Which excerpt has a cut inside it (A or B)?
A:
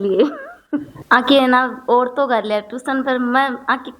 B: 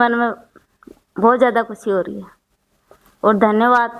A